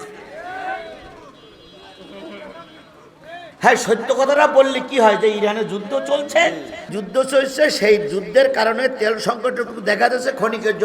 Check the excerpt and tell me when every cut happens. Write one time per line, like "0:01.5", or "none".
0:07.0